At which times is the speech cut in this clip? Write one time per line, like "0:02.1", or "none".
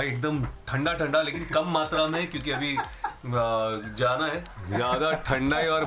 0:04.5